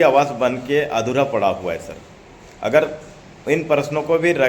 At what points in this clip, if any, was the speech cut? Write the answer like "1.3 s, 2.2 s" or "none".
none